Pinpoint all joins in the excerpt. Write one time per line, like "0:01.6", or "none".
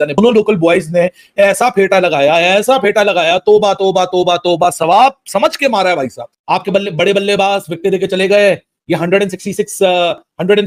none